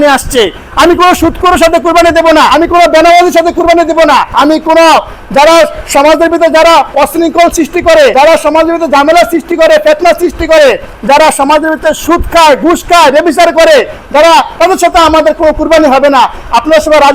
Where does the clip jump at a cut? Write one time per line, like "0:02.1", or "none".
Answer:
0:02.5
0:04.3
0:08.1